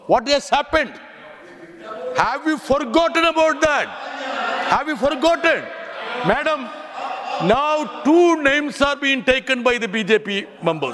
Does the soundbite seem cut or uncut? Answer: uncut